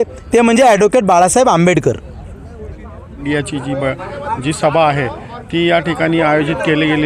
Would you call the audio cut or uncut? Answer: cut